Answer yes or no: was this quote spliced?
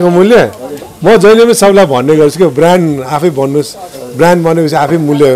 no